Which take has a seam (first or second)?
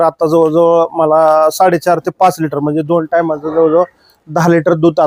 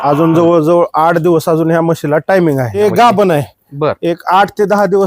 second